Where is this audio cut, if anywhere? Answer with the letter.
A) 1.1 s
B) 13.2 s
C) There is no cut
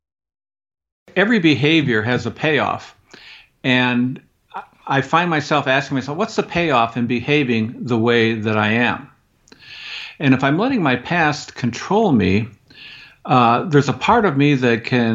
A